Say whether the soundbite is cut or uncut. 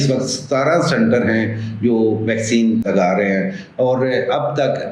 cut